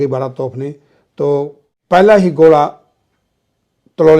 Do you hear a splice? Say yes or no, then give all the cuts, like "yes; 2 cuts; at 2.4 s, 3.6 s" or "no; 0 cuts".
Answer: yes; 1 cut; at 1.7 s